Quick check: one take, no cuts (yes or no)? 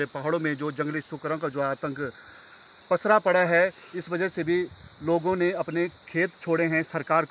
yes